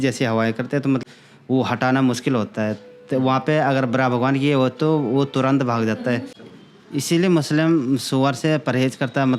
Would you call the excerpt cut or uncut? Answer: cut